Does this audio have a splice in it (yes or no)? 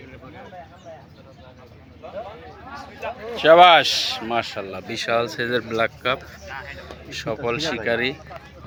no